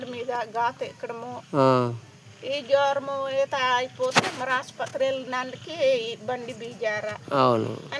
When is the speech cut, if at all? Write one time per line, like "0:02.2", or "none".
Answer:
none